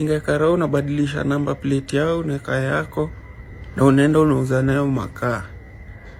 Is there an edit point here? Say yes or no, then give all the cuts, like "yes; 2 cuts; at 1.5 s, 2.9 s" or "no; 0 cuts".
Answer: no; 0 cuts